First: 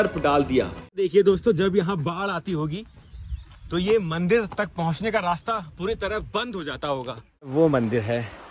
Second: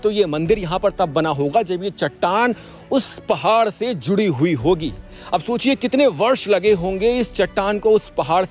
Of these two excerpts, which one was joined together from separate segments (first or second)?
first